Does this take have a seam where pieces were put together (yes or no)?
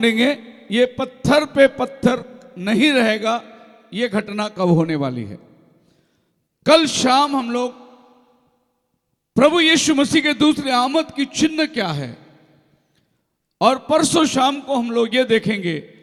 no